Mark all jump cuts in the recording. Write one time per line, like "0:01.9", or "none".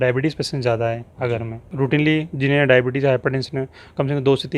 0:01.7